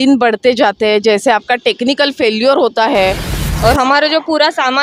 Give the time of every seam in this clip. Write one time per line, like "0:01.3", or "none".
0:03.4